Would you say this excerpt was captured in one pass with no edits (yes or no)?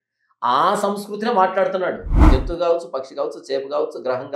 no